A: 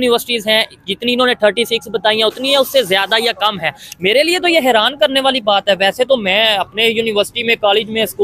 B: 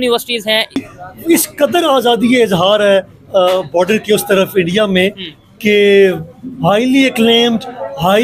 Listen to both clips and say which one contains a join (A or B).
B